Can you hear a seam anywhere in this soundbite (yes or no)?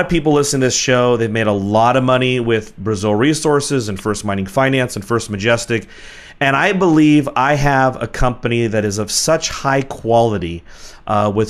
yes